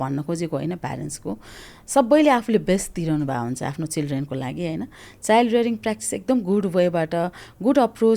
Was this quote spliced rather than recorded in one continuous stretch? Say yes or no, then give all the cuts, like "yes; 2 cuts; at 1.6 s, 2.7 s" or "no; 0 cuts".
no; 0 cuts